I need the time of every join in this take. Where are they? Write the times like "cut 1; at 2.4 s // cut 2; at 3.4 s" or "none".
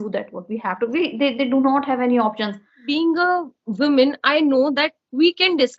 cut 1; at 2.8 s